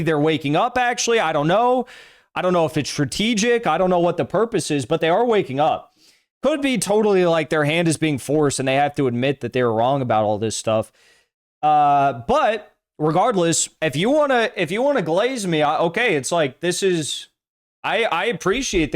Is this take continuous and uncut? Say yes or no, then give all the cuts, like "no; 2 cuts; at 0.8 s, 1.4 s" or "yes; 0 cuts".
no; 1 cut; at 13.7 s